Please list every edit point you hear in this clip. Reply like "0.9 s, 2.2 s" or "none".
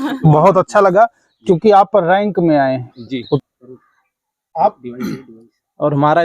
3.4 s